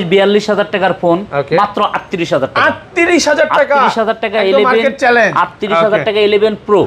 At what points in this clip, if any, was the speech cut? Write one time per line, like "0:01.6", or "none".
none